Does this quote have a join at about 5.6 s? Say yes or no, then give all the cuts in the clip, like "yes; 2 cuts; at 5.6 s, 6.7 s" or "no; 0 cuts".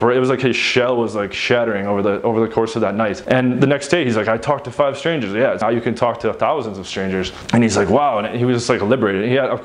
yes; 1 cut; at 5.6 s